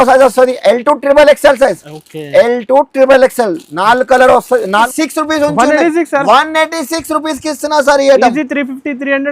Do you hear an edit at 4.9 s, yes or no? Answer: yes